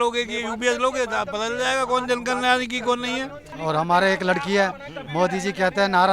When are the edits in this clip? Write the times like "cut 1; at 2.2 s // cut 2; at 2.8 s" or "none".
cut 1; at 3.4 s